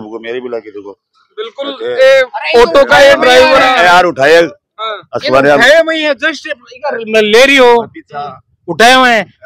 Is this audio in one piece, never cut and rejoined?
yes; 0 cuts

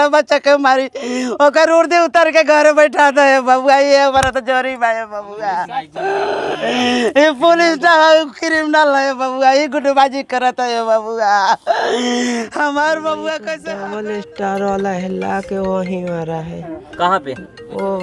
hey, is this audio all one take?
no; 1 cut; at 13.6 s

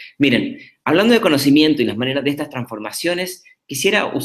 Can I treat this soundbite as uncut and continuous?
yes; 0 cuts

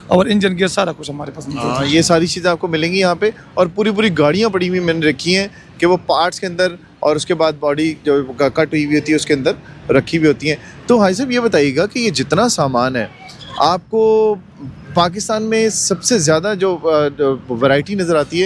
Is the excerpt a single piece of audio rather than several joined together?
yes; 0 cuts

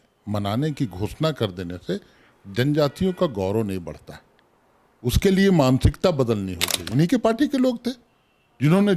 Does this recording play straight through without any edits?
no; 1 cut; at 6.8 s

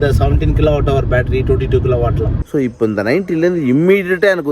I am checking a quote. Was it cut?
yes; 1 cut; at 2.4 s

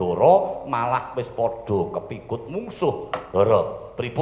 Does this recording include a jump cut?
no; 0 cuts

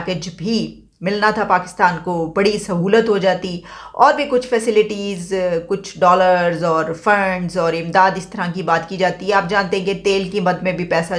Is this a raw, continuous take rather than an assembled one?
yes; 0 cuts

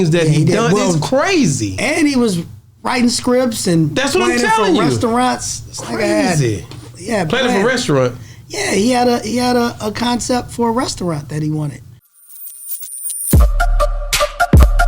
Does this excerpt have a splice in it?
yes; 1 cut; at 11.9 s

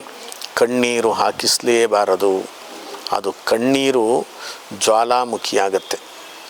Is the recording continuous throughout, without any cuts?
yes; 0 cuts

